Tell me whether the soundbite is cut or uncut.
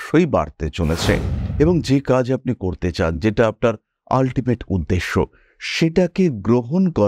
cut